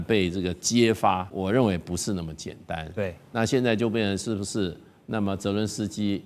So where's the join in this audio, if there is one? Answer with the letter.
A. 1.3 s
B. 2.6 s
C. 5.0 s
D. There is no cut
A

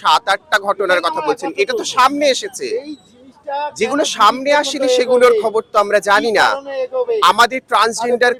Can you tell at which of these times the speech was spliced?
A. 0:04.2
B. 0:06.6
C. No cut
C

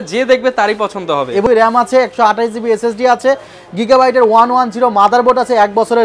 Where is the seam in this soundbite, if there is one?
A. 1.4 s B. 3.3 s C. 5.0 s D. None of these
A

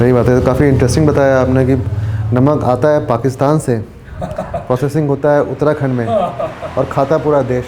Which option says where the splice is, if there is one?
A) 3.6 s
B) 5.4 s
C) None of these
C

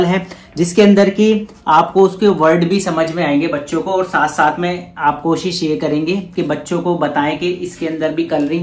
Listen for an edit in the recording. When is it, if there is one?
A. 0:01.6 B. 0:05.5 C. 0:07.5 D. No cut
D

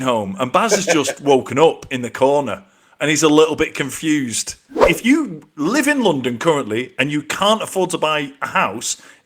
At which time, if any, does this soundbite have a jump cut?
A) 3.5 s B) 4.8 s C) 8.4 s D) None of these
B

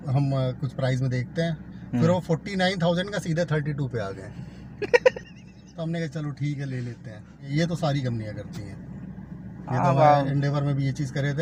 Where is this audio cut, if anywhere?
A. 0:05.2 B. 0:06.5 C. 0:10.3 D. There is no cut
D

